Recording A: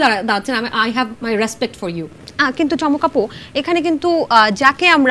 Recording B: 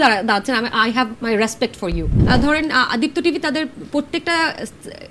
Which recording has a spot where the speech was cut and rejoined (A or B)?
B